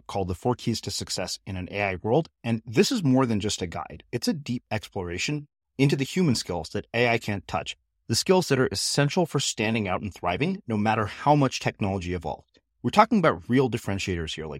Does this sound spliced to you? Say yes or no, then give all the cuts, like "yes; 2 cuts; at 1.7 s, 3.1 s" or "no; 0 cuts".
no; 0 cuts